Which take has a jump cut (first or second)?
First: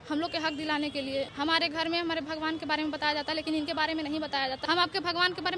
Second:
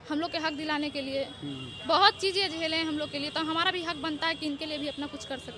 first